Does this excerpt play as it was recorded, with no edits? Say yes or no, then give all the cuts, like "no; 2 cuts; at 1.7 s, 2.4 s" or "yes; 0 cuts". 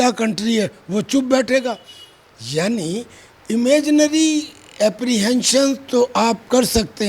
yes; 0 cuts